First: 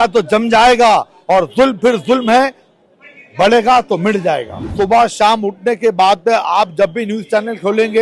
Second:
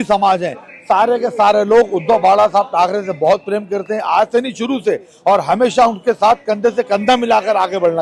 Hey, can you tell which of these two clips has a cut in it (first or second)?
first